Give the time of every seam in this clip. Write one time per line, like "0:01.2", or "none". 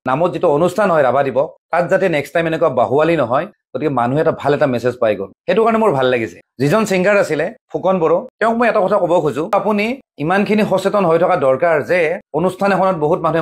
0:08.3
0:09.5